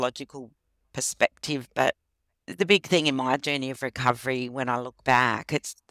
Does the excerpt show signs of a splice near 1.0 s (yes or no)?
no